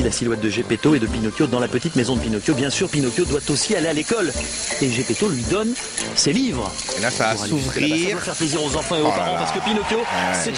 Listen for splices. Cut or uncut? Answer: uncut